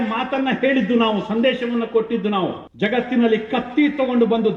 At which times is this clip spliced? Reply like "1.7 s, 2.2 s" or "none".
2.6 s